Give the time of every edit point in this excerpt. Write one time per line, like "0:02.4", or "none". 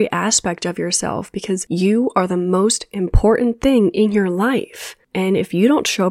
0:01.6